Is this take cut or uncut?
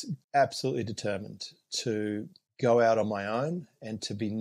uncut